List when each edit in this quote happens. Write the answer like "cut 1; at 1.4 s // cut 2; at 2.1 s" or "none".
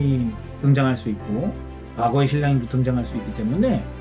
none